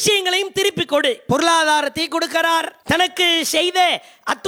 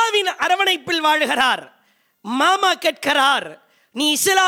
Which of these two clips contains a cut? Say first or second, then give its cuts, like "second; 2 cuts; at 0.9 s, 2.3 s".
first; 2 cuts; at 1.2 s, 2.7 s